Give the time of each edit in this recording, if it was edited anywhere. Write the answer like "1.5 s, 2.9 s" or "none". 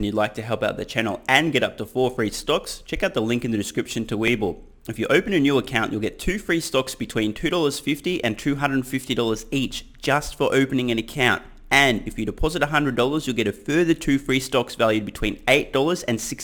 none